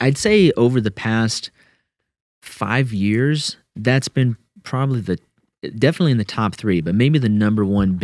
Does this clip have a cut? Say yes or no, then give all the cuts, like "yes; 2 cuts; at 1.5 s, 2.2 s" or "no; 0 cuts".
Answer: no; 0 cuts